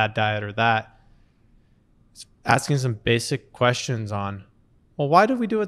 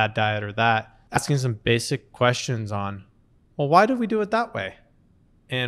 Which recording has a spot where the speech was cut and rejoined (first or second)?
second